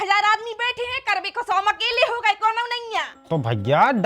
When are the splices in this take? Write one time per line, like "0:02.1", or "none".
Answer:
0:03.1

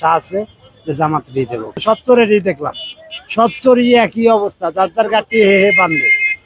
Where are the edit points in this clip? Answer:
0:01.8

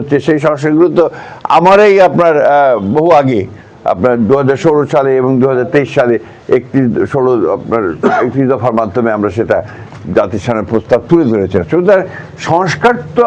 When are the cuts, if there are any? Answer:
none

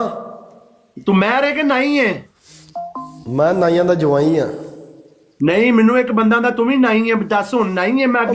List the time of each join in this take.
none

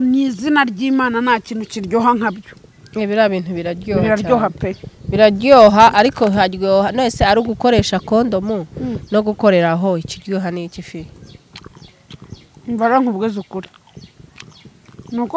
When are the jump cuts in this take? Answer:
none

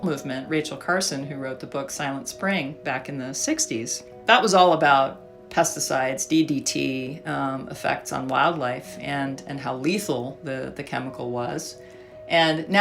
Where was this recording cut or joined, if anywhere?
0:04.1

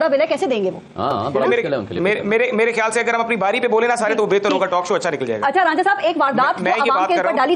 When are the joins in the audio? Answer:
none

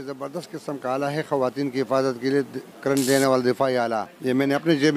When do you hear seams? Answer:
0:04.1

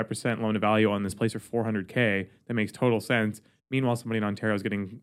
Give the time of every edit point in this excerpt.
none

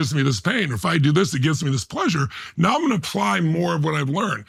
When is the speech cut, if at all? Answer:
none

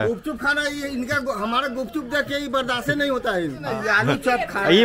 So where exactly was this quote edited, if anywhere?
0:03.7

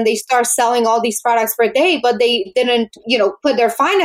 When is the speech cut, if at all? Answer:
0:02.5

